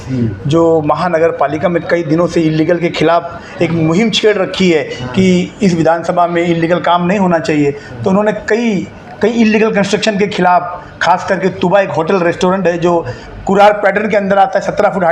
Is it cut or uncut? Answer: uncut